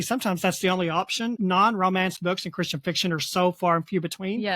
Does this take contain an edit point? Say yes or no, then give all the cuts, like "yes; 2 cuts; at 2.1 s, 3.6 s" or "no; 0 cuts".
yes; 1 cut; at 1.4 s